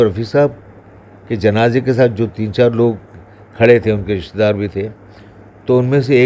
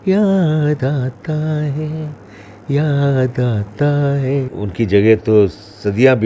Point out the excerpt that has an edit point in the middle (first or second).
second